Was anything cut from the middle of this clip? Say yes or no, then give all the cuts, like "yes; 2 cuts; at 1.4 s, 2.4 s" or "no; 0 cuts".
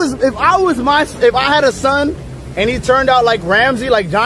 no; 0 cuts